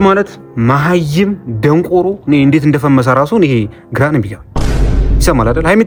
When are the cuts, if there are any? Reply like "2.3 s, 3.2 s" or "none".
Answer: none